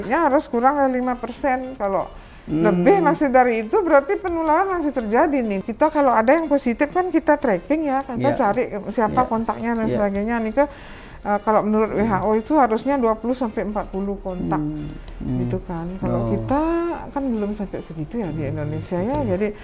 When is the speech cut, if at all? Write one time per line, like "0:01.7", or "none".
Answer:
none